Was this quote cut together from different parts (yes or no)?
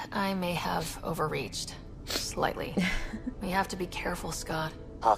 yes